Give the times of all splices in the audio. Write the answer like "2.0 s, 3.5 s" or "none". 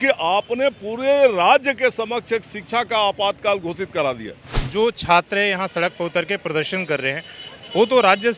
4.6 s